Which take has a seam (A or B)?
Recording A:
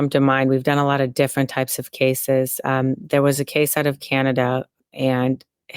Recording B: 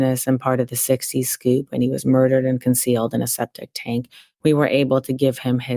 A